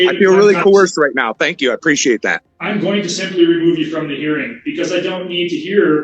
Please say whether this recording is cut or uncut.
cut